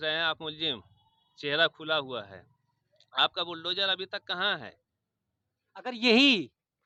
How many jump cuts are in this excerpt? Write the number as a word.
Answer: zero